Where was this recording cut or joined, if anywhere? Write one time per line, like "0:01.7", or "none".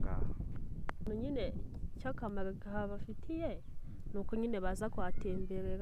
0:01.1